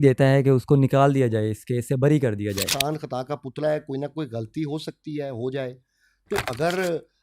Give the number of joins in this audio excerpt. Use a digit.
1